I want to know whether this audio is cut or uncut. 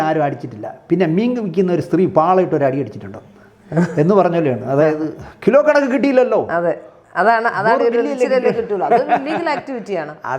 uncut